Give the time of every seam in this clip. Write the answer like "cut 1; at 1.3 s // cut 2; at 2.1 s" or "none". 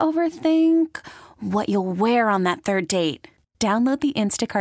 none